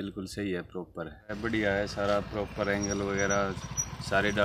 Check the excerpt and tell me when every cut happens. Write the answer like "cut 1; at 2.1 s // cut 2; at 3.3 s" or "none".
cut 1; at 1.4 s